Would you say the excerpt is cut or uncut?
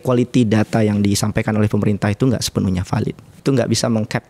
cut